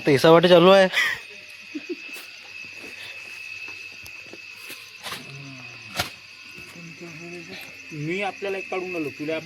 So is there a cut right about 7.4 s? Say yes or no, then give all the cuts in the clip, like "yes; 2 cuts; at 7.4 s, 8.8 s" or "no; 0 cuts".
no; 0 cuts